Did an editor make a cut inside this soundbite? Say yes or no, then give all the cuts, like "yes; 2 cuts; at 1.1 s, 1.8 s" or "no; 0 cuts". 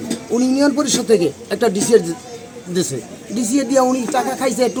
no; 0 cuts